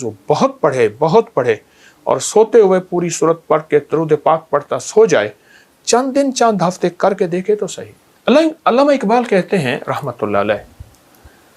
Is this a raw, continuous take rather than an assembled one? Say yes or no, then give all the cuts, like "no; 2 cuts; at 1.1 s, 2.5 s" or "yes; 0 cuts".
yes; 0 cuts